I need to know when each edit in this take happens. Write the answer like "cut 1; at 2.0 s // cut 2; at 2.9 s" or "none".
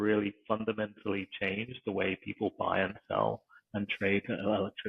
none